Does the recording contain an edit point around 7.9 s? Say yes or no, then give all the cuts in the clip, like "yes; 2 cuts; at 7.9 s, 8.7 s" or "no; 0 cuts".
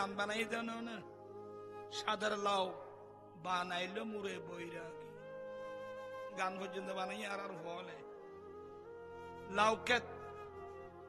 no; 0 cuts